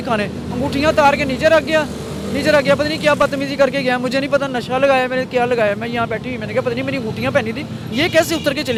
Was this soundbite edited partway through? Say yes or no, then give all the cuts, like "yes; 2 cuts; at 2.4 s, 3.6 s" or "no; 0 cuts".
no; 0 cuts